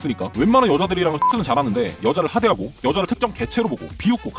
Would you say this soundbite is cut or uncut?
uncut